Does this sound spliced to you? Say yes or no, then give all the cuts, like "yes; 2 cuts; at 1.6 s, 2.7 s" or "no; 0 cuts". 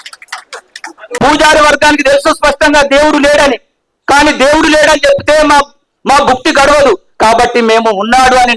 yes; 1 cut; at 1.1 s